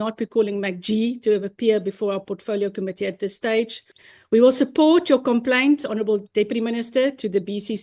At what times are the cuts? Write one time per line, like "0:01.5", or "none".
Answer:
none

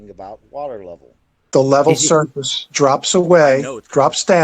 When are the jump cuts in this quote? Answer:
0:01.3

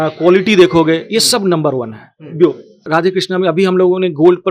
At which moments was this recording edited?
0:02.8

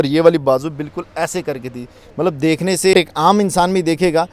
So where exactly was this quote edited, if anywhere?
0:02.9

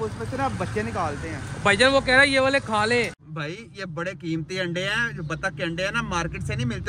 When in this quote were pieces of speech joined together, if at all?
0:03.2

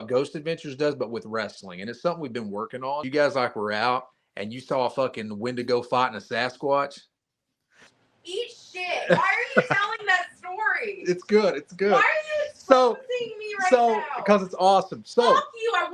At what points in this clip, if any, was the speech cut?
0:03.0
0:07.8

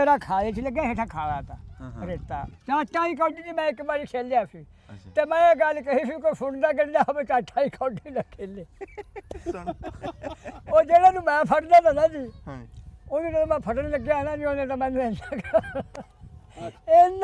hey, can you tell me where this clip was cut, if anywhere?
0:02.6

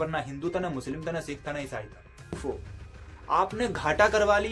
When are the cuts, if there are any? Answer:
0:02.4

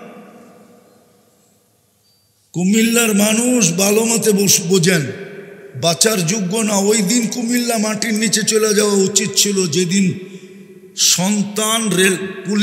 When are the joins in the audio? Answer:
none

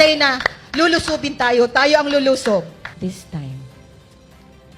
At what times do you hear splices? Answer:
0:02.8

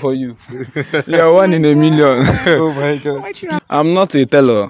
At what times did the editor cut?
0:03.5

